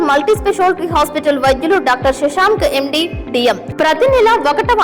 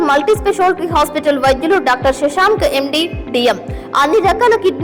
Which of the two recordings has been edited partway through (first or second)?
first